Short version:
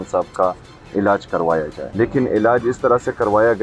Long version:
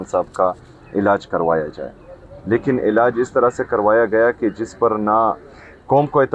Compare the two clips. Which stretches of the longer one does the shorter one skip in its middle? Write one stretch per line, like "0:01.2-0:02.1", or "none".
0:01.8-0:02.3